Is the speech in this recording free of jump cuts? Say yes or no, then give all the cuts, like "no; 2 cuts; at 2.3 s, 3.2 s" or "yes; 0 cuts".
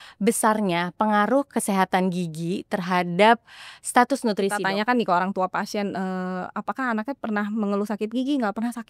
no; 1 cut; at 4.5 s